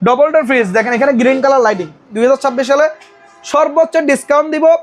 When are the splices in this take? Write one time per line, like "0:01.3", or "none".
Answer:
0:02.1